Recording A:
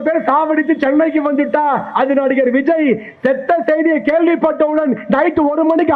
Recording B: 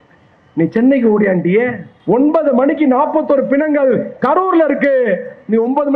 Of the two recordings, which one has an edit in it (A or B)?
B